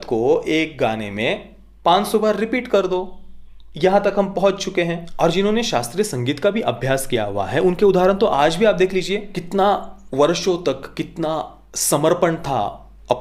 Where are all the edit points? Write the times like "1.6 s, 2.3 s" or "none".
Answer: 5.1 s, 9.4 s